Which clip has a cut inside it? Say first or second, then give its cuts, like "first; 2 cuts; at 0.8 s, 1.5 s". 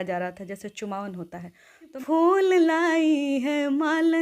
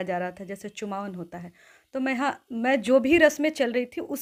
first; 1 cut; at 1.9 s